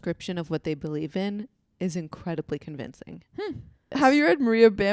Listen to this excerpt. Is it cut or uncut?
cut